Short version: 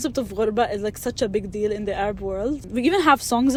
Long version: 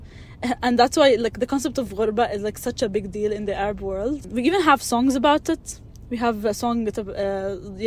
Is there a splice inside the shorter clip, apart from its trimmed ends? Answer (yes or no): no